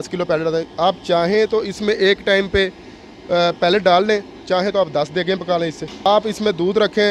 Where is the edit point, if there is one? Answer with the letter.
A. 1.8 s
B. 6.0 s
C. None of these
B